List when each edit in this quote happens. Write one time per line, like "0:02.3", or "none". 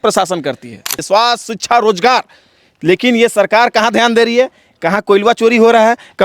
0:01.0